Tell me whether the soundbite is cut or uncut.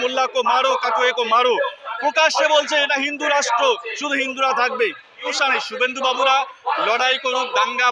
cut